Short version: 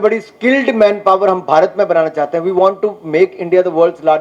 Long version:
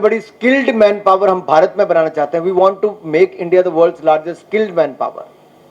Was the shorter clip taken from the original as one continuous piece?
yes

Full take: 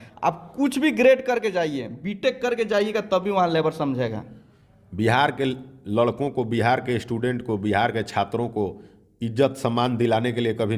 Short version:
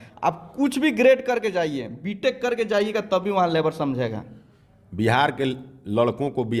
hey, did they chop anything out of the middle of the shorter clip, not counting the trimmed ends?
no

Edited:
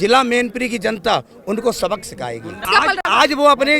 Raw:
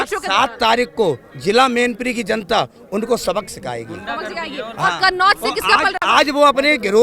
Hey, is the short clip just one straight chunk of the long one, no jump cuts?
no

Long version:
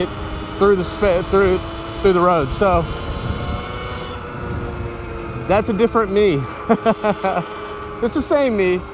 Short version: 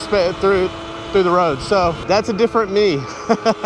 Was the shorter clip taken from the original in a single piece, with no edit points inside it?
no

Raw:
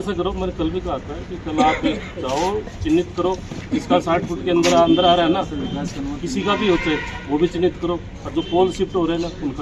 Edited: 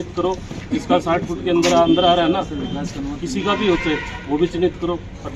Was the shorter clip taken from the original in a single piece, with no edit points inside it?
yes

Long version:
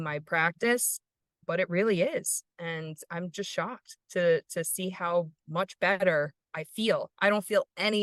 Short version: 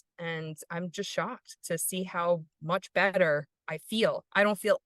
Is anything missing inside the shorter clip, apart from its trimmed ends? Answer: yes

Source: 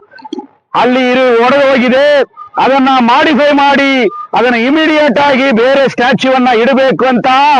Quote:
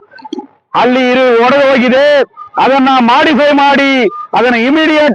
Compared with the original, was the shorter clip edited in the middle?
no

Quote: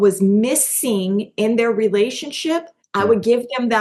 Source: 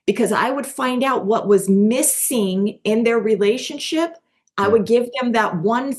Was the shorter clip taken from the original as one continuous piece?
no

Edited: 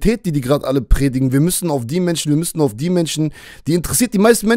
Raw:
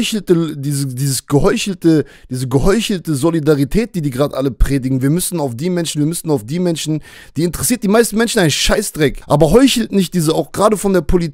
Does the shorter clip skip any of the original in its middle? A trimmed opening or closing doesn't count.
no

